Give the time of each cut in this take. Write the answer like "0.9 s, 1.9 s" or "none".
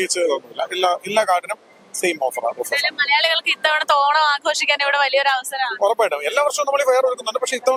none